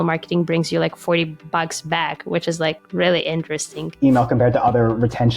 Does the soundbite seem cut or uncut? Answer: cut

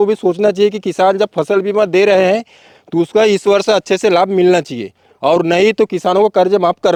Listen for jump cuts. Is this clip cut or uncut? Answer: uncut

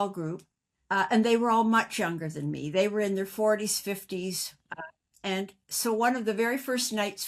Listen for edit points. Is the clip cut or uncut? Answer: uncut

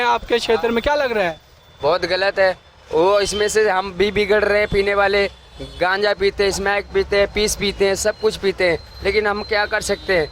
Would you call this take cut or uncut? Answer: uncut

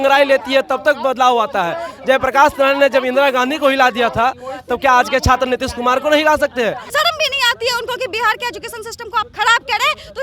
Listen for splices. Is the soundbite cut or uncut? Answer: cut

